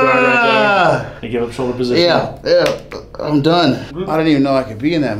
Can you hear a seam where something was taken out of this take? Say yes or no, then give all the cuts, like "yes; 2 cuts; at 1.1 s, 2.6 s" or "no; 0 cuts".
yes; 2 cuts; at 1.2 s, 3.9 s